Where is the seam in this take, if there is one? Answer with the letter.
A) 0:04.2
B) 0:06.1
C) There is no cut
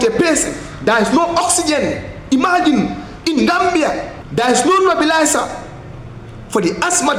A